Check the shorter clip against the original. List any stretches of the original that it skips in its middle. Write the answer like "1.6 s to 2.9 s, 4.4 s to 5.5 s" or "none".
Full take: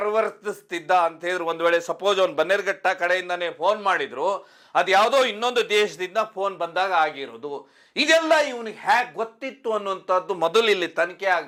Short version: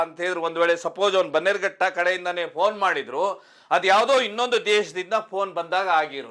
none